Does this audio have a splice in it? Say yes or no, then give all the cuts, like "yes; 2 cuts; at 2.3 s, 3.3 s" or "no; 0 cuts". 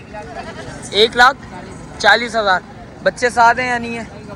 no; 0 cuts